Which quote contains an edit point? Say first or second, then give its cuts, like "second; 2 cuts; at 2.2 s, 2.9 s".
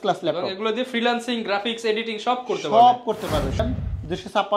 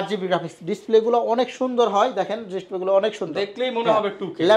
first; 1 cut; at 3.6 s